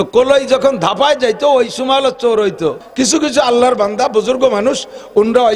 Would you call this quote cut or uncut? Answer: cut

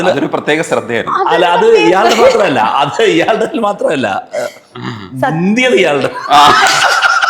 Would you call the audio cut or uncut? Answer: uncut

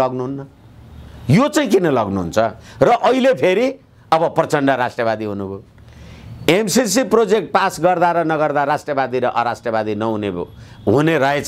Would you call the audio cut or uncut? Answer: uncut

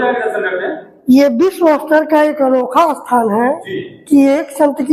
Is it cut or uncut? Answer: uncut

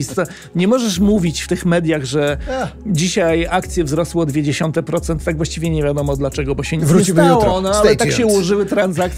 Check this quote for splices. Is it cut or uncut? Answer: uncut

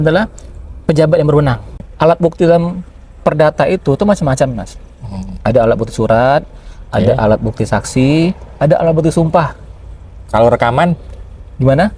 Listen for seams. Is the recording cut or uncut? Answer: cut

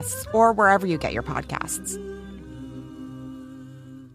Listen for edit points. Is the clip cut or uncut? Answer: cut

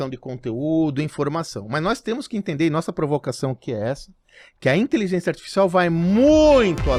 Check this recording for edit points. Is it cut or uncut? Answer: uncut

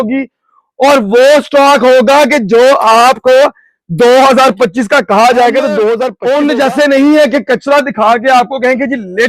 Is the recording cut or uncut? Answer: cut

